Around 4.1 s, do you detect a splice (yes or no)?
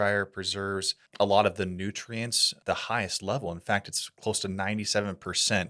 no